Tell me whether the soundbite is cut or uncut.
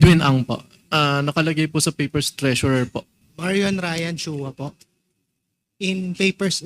cut